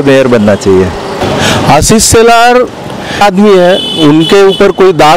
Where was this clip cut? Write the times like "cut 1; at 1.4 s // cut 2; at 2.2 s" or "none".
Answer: cut 1; at 1.2 s // cut 2; at 3.2 s